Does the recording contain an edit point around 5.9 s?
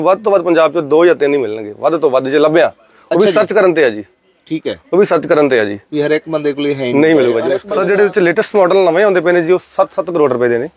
no; 1 cut; at 7.6 s

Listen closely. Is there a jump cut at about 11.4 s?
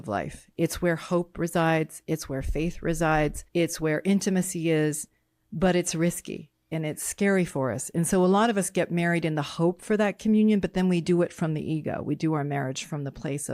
no; 1 cut; at 3.4 s

